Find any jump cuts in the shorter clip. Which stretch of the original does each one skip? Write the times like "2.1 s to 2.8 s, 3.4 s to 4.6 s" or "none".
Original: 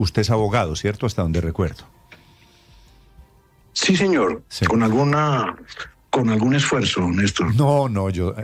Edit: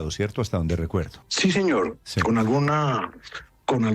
1.9 s to 3.7 s